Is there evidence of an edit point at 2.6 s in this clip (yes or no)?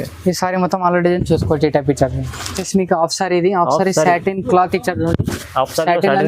yes